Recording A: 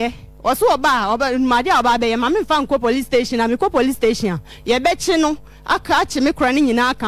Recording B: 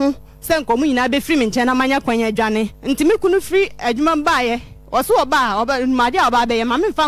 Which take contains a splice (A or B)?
B